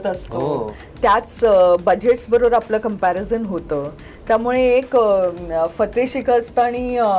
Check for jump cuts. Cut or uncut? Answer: uncut